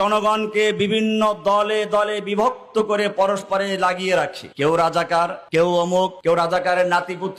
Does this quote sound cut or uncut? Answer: uncut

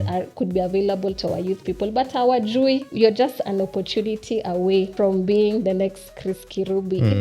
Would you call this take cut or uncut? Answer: cut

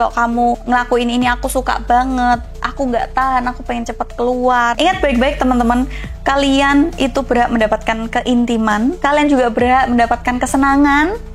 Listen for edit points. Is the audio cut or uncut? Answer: cut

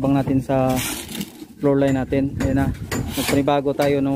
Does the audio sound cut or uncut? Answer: cut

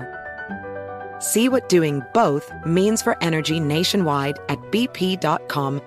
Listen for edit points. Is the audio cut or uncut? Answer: uncut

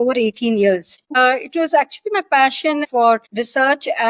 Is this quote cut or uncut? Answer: cut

